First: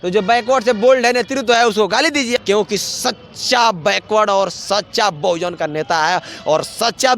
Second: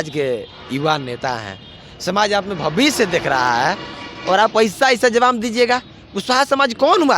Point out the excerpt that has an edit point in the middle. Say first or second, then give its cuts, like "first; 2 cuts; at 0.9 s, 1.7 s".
first; 1 cut; at 2.4 s